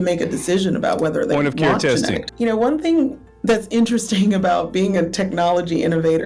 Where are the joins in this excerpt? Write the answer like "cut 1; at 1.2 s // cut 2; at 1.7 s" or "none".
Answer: cut 1; at 2.3 s